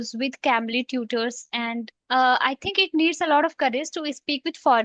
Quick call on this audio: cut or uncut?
cut